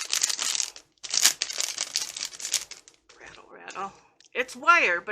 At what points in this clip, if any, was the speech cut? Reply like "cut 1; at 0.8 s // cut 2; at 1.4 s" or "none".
cut 1; at 4.1 s